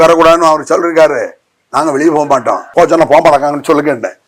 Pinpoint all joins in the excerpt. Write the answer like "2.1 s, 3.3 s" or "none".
2.7 s